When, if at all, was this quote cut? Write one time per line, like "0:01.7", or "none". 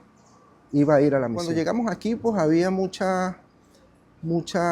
0:01.4